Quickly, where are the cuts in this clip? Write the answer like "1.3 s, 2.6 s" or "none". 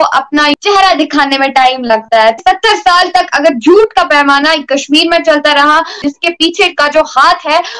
2.4 s, 5.9 s